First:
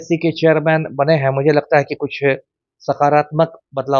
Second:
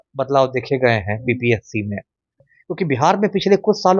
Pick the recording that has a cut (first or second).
second